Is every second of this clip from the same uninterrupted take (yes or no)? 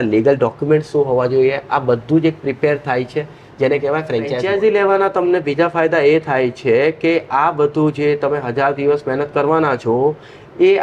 no